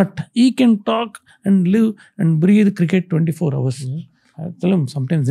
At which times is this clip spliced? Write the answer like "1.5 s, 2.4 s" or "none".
none